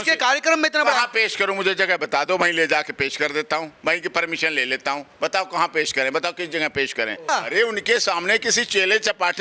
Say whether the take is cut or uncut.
cut